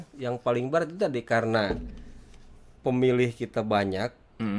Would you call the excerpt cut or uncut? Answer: uncut